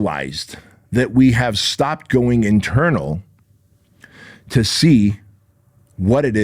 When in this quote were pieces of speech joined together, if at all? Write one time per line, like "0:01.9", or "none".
none